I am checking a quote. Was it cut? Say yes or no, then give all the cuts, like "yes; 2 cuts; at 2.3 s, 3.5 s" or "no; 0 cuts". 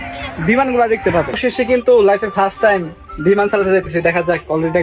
yes; 1 cut; at 1.3 s